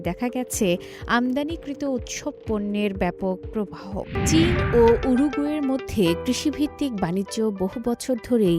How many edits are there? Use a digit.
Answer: 1